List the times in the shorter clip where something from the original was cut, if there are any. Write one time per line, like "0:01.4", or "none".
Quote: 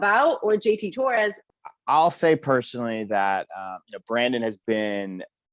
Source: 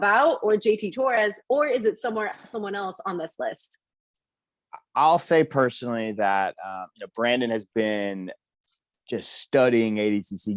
0:01.4